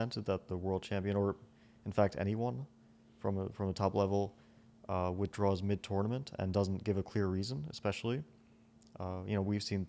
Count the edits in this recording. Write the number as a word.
zero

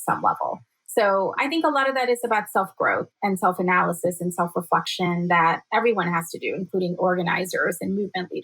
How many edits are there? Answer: two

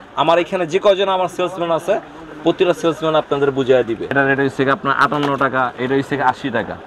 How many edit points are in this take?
one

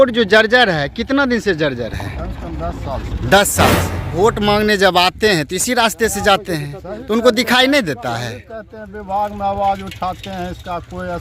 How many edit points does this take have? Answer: one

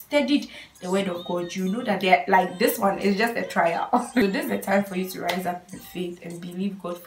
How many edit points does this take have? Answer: one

